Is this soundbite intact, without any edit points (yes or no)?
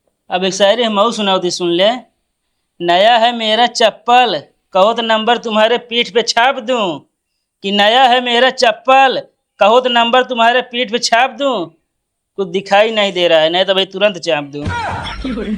no